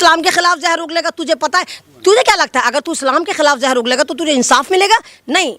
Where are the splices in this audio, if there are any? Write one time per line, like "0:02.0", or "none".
none